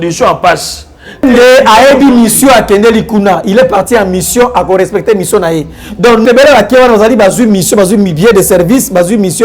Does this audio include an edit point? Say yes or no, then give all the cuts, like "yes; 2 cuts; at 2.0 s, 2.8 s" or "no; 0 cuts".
yes; 2 cuts; at 1.2 s, 6.2 s